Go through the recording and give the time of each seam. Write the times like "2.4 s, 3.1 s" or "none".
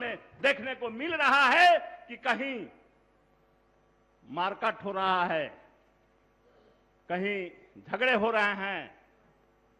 none